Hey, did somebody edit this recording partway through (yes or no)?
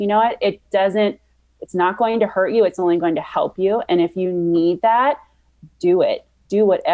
no